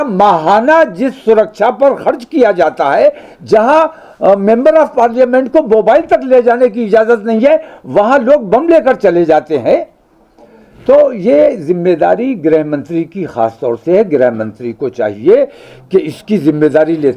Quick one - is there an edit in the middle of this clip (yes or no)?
no